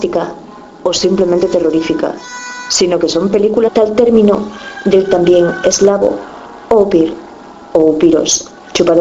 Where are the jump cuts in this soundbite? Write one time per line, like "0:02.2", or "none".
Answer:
none